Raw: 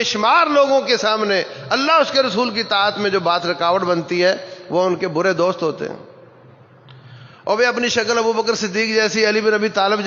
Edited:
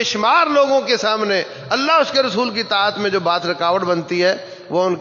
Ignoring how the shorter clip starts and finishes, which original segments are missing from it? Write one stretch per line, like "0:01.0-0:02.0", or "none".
none